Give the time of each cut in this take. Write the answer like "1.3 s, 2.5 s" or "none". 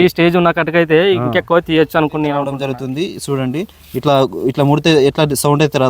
2.7 s